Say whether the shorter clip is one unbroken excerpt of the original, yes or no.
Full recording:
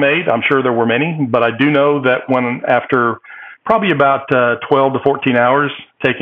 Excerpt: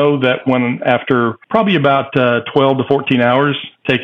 no